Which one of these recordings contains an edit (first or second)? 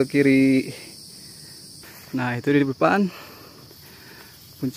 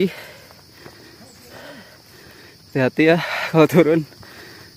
first